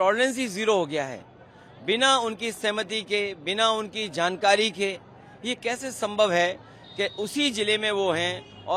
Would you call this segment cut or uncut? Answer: uncut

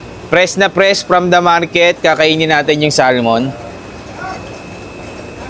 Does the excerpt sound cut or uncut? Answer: uncut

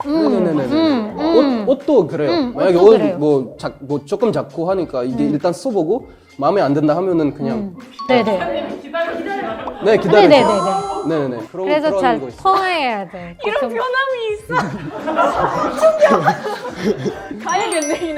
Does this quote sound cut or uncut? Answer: uncut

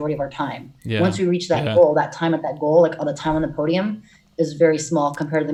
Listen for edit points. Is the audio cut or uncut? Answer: uncut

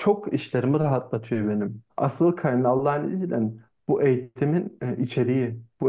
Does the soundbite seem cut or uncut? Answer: cut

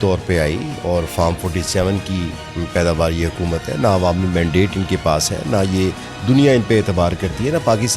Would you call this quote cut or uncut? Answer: uncut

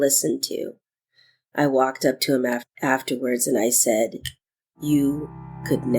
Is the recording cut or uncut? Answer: cut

